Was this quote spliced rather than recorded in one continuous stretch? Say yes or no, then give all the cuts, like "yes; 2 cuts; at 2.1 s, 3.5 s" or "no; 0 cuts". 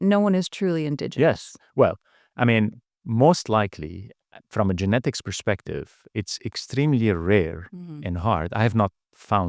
no; 0 cuts